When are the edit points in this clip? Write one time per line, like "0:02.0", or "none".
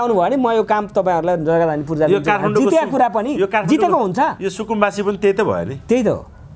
none

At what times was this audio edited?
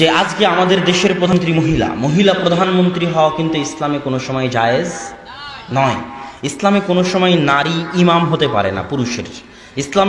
0:01.3

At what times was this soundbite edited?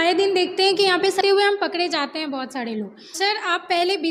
0:01.2
0:03.1

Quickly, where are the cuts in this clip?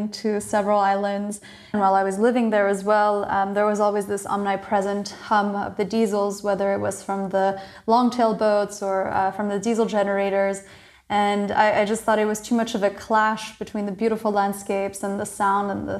0:01.7

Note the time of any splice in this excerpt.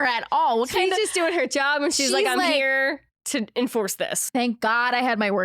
0:04.3

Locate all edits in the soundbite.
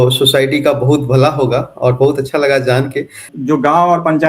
0:03.3

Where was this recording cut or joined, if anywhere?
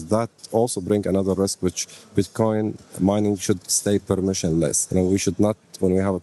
0:04.8

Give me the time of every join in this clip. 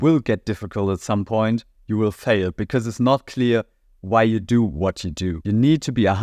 0:05.3

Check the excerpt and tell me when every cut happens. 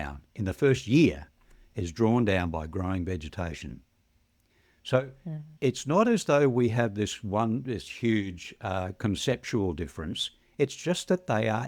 0:05.5

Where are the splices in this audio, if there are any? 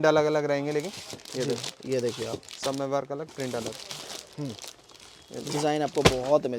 none

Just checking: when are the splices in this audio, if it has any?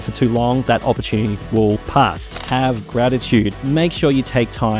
0:02.3
0:03.6

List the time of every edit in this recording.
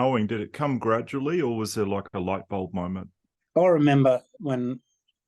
0:03.4
0:04.4

